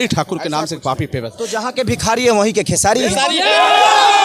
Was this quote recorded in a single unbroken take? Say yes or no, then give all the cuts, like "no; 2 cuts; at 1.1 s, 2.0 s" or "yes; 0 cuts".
yes; 0 cuts